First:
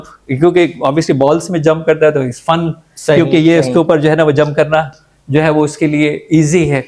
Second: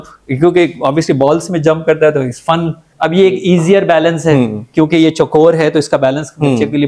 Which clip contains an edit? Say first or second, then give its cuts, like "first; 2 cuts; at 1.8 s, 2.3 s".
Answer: second; 1 cut; at 2.9 s